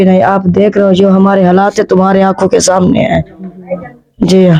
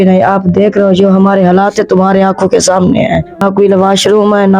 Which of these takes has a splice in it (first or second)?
second